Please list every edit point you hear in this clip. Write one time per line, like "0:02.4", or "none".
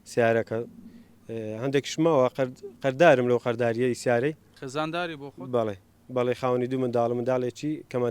0:04.5